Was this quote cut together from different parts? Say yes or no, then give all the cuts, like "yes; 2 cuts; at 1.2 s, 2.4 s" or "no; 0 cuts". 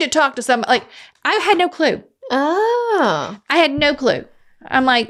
no; 0 cuts